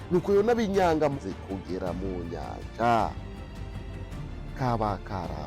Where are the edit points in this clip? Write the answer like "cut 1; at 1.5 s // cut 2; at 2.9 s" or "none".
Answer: cut 1; at 1.2 s